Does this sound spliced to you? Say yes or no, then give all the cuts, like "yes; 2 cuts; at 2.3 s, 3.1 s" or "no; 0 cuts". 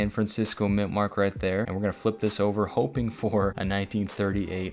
yes; 2 cuts; at 1.7 s, 3.6 s